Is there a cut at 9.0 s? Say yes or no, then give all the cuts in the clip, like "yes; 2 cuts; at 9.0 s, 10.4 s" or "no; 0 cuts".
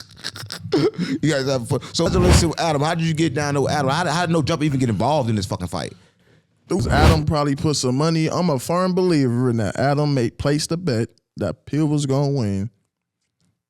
no; 2 cuts; at 2.1 s, 6.8 s